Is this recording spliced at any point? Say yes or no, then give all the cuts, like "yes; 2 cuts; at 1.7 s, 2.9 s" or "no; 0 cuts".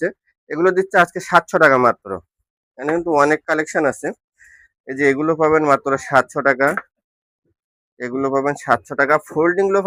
no; 0 cuts